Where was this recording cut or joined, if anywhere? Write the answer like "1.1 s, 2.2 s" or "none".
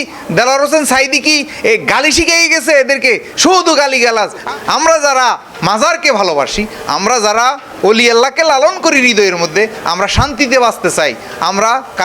4.5 s